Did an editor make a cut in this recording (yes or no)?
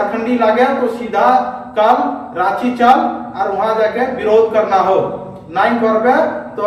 no